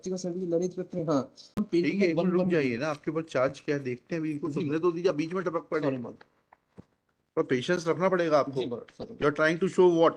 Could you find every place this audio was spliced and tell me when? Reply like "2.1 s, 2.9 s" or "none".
1.5 s

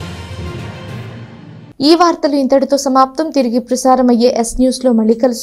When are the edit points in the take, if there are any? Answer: none

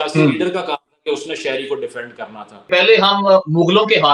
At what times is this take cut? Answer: 2.7 s

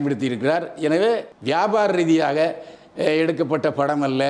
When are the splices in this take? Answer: 1.3 s

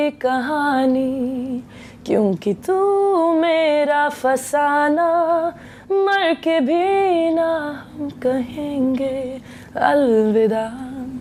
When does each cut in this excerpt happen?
none

